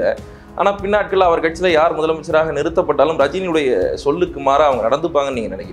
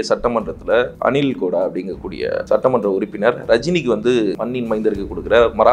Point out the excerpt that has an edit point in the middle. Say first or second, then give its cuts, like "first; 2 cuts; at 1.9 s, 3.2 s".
second; 3 cuts; at 0.9 s, 2.4 s, 4.4 s